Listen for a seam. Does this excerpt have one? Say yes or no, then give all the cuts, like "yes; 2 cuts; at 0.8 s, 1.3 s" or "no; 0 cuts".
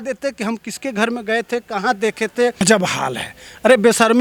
no; 0 cuts